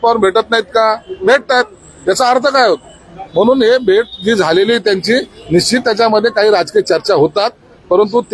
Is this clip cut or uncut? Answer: uncut